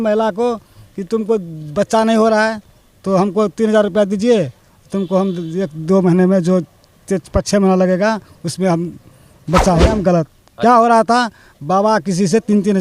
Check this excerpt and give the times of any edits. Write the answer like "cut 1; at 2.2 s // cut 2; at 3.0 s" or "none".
cut 1; at 9.9 s